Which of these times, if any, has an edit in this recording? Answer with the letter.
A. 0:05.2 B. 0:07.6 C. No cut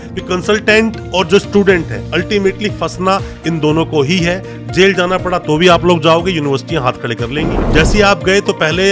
B